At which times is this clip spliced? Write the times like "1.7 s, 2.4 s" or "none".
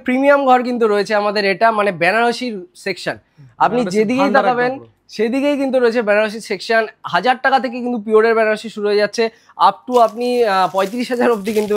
none